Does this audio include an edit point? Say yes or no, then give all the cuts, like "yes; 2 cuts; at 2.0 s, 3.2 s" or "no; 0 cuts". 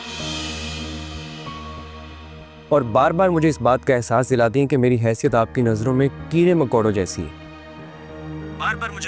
no; 0 cuts